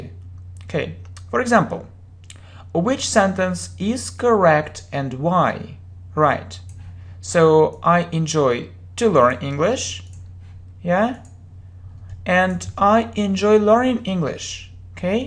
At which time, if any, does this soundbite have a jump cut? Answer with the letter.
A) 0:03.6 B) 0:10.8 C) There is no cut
C